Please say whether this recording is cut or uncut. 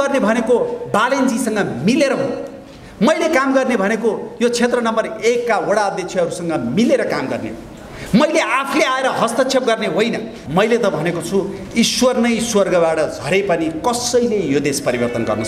cut